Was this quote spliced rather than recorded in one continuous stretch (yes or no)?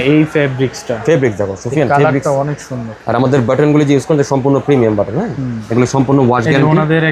no